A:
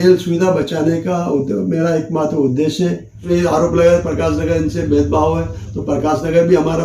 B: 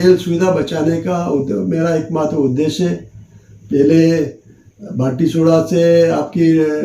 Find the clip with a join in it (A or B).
A